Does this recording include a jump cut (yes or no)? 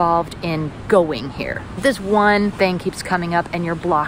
yes